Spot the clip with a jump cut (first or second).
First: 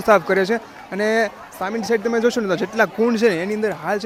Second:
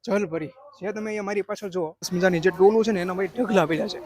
second